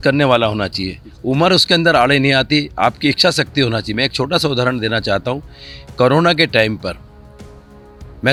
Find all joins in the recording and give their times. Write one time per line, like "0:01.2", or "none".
none